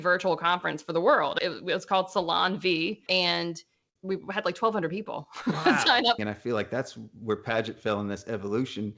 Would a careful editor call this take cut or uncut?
cut